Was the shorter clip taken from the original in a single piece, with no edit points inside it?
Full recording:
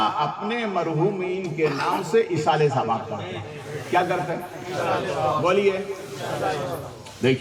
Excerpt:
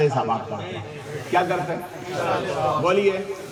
yes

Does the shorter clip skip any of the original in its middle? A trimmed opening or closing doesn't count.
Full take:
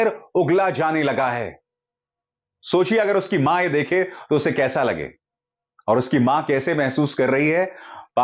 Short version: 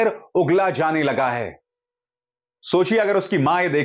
no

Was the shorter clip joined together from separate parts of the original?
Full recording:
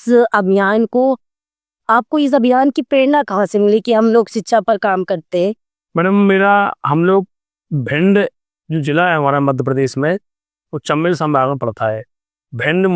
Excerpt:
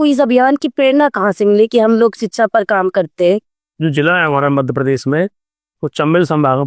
yes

